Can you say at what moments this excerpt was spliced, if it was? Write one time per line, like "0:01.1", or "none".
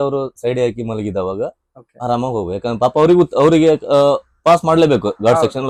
none